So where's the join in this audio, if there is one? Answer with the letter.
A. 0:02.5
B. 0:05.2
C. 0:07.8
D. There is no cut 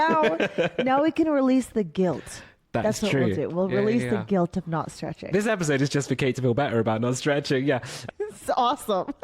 B